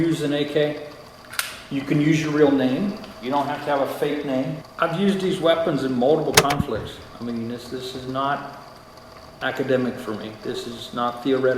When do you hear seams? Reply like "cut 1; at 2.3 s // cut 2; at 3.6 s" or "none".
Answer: cut 1; at 4.6 s